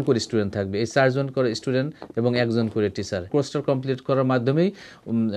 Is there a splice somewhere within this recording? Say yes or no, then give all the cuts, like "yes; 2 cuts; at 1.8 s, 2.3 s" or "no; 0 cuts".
yes; 1 cut; at 3.3 s